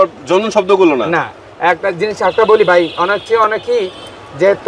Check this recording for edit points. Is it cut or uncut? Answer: uncut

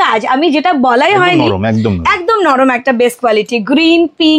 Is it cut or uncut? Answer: uncut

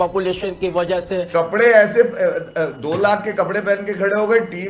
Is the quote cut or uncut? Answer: cut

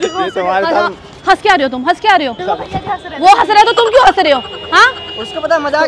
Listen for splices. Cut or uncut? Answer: cut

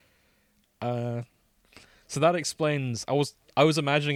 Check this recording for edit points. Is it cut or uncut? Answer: uncut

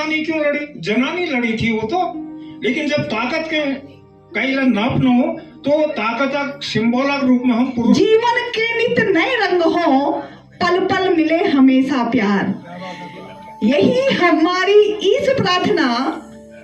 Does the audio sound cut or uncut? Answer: cut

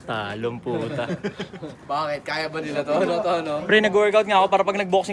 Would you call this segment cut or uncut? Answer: cut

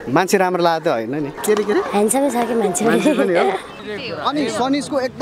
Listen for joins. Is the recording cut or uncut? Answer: cut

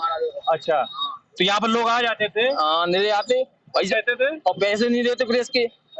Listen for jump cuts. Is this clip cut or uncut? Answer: uncut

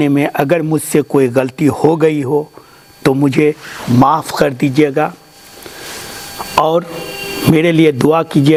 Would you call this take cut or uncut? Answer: uncut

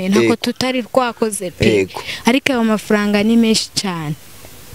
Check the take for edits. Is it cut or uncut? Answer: uncut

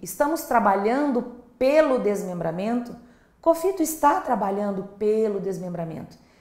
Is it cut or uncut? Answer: uncut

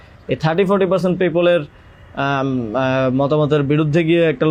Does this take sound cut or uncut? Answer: uncut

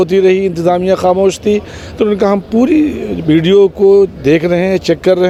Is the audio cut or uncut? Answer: uncut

